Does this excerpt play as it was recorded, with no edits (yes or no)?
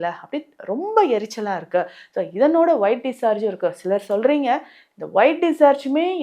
yes